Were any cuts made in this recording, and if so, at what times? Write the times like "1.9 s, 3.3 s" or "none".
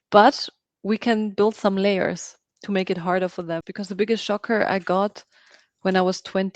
3.7 s